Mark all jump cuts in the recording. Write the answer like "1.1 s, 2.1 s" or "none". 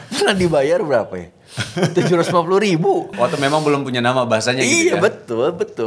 3.1 s